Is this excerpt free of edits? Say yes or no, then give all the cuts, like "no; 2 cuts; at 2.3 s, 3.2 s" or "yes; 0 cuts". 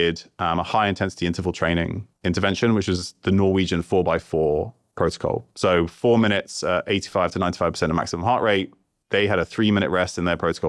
yes; 0 cuts